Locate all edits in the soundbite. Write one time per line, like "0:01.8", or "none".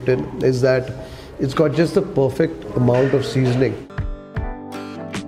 0:03.9